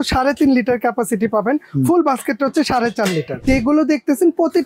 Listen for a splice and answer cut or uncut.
cut